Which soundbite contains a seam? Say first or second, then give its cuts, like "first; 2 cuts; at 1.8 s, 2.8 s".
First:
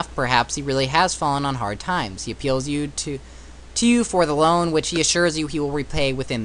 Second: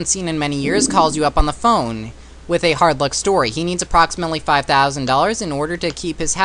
second; 1 cut; at 1.1 s